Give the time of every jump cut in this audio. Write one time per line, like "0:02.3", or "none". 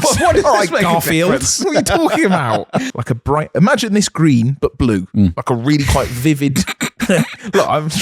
0:02.9